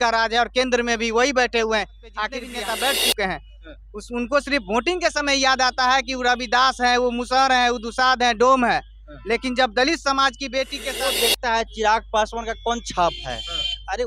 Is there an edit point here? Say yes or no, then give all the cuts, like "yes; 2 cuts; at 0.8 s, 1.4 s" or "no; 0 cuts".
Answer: yes; 2 cuts; at 2.5 s, 10.8 s